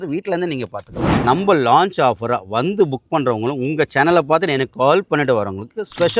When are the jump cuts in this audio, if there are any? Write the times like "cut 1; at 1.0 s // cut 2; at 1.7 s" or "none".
cut 1; at 1.1 s